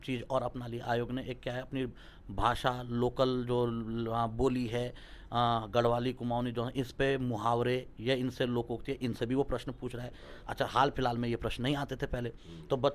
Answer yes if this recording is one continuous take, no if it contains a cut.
yes